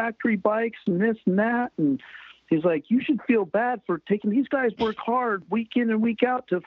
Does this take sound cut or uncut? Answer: uncut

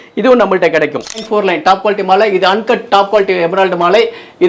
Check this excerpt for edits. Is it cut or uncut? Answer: cut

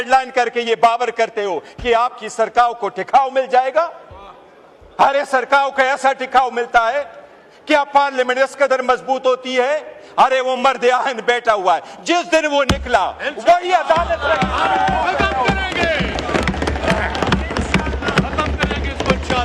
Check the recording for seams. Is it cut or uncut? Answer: uncut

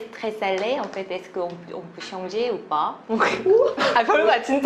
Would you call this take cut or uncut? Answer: uncut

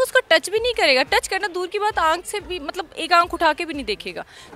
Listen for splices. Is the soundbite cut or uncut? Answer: uncut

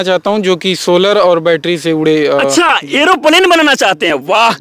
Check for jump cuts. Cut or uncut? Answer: uncut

